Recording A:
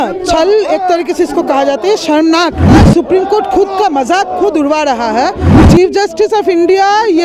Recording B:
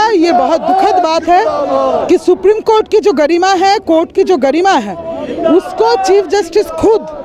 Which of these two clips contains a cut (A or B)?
A